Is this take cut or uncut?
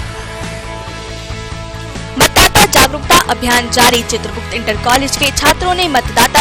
cut